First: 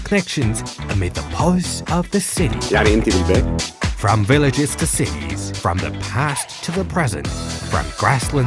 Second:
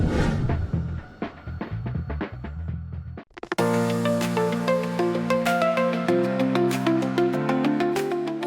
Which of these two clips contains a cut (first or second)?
second